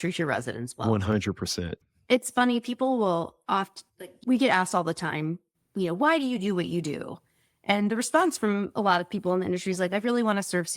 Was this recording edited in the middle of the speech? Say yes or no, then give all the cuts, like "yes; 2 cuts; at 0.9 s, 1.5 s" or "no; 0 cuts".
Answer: yes; 2 cuts; at 1.8 s, 4.1 s